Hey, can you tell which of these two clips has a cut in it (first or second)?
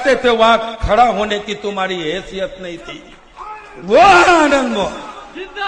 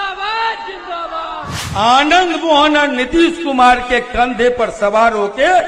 second